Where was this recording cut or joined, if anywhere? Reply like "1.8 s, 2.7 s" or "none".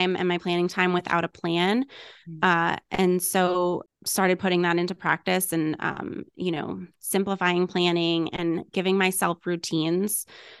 4.0 s